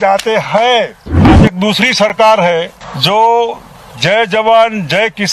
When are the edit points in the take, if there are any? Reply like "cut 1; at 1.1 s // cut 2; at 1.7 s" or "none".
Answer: cut 1; at 1.4 s // cut 2; at 2.8 s